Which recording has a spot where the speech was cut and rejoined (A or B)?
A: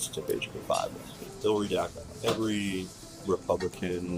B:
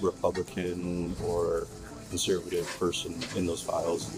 A